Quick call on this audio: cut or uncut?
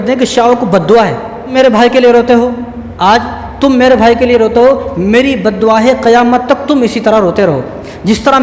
cut